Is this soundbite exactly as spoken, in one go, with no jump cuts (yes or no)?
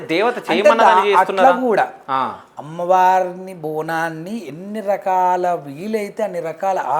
yes